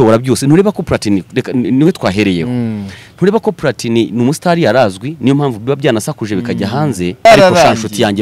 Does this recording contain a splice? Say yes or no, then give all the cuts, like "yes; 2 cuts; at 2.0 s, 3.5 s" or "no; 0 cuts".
yes; 1 cut; at 7.2 s